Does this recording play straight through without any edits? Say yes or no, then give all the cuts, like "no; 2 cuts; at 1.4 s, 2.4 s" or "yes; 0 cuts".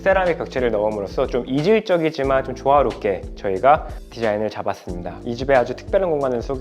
no; 1 cut; at 5.2 s